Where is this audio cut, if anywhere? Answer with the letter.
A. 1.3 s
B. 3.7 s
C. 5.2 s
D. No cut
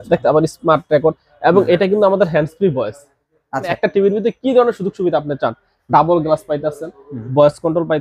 B